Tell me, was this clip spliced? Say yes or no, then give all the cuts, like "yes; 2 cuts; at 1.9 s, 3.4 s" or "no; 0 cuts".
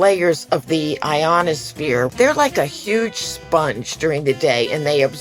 yes; 1 cut; at 2.1 s